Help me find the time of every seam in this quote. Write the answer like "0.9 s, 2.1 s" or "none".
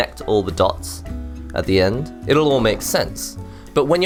none